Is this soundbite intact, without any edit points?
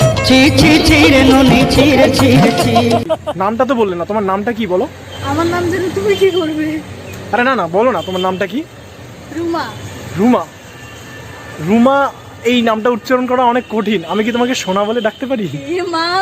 no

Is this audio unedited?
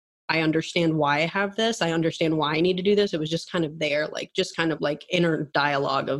no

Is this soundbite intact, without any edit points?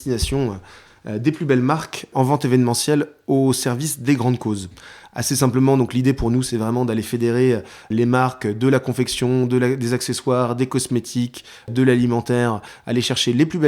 no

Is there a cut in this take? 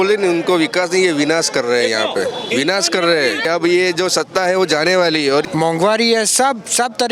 yes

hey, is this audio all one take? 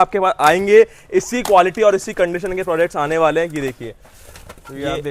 yes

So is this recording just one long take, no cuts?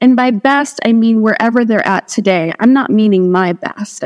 yes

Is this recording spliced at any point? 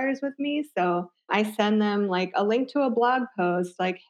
yes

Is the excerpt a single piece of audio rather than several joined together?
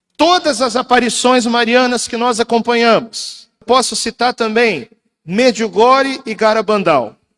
no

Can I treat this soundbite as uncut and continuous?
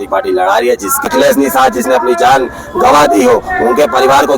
no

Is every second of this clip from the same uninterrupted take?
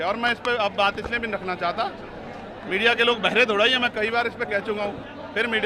yes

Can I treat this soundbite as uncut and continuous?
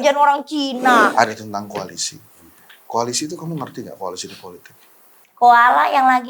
no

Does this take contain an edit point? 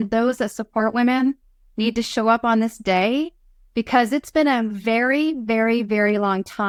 no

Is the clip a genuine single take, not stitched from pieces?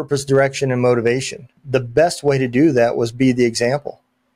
no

